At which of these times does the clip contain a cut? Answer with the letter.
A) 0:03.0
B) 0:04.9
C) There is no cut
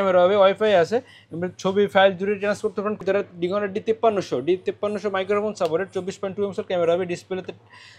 A